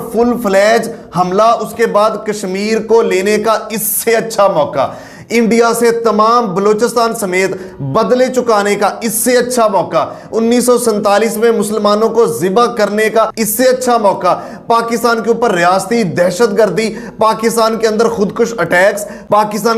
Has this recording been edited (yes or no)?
no